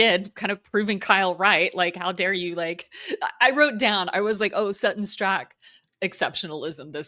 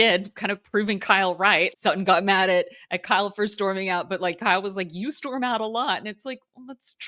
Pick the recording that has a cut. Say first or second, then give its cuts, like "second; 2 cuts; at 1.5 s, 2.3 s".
second; 1 cut; at 1.7 s